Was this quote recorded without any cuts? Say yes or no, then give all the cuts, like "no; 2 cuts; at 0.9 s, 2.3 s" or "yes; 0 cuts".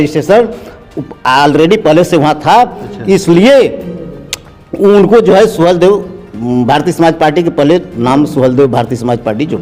yes; 0 cuts